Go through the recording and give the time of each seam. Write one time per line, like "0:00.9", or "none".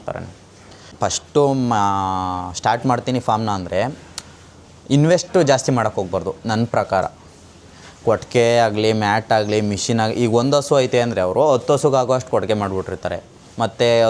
0:00.9